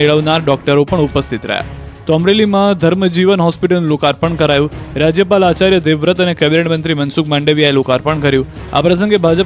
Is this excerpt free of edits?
no; 1 cut; at 1.0 s

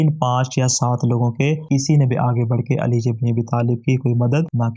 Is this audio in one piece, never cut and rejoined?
yes; 0 cuts

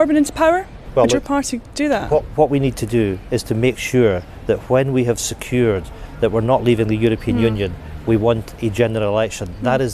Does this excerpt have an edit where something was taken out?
yes; 1 cut; at 1.6 s

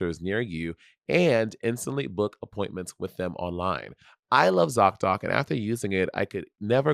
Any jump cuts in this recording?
yes; 1 cut; at 3.9 s

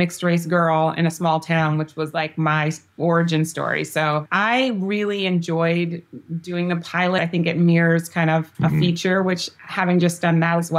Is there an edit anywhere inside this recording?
yes; 3 cuts; at 4.3 s, 7.2 s, 8.5 s

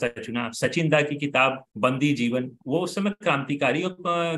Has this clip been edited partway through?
yes; 2 cuts; at 1.7 s, 2.6 s

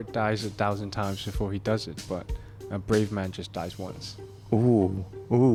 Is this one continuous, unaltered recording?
yes; 0 cuts

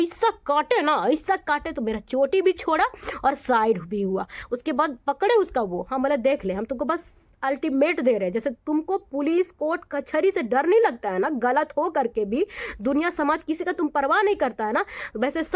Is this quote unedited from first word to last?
yes; 0 cuts

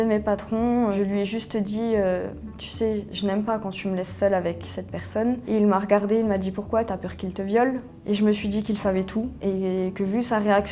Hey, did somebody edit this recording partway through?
yes; 2 cuts; at 0.9 s, 5.4 s

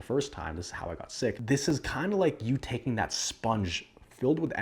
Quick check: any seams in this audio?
yes; 1 cut; at 1.4 s

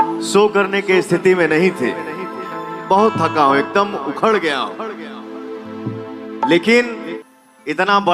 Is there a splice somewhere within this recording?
yes; 1 cut; at 7.1 s

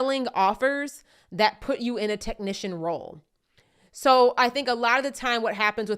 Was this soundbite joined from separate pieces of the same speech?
no; 0 cuts

